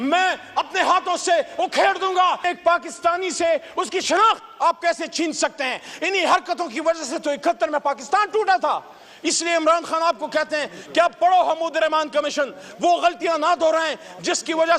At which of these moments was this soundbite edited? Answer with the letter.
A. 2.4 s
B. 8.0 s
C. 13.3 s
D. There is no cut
A